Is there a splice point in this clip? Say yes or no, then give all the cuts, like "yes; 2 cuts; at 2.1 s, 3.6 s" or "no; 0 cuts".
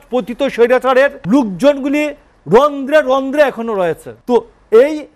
yes; 2 cuts; at 1.2 s, 4.1 s